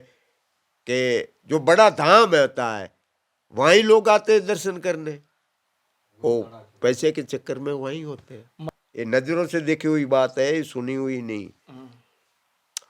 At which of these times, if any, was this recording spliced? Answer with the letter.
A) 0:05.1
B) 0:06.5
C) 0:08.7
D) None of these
C